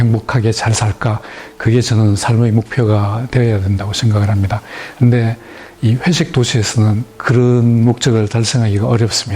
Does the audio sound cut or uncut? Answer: uncut